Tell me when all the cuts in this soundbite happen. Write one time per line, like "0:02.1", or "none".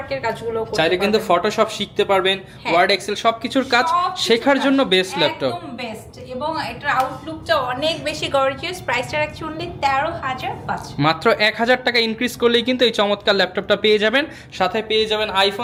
none

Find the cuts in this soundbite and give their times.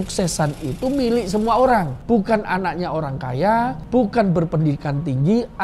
0:01.9
0:03.8

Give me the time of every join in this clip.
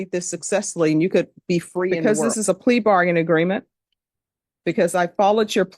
0:02.0

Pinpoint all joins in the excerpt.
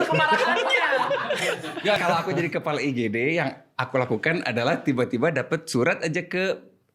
0:02.0

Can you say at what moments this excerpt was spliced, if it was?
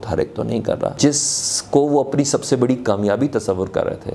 0:00.9

